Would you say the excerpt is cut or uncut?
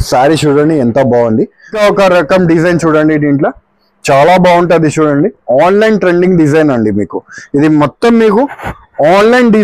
cut